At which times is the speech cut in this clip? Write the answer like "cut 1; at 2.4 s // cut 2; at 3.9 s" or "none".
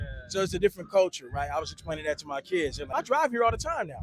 cut 1; at 2.9 s

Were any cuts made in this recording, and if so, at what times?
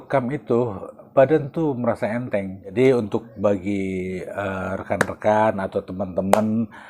cut 1; at 0.9 s // cut 2; at 2.7 s

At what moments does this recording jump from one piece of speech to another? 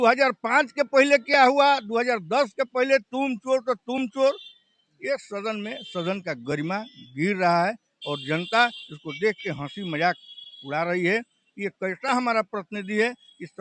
none

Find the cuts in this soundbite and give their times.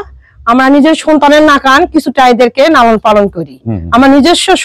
none

